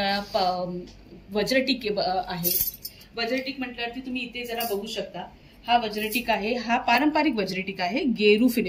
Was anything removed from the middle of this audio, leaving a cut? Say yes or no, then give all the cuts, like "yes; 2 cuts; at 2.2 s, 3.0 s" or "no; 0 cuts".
no; 0 cuts